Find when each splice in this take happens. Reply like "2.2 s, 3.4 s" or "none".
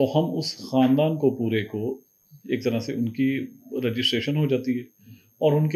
none